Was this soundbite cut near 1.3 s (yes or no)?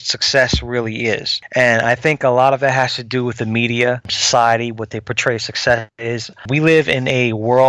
yes